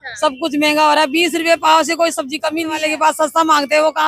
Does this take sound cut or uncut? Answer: cut